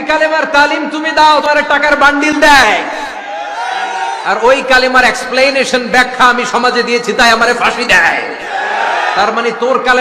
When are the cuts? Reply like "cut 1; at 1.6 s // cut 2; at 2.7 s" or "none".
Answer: cut 1; at 1.4 s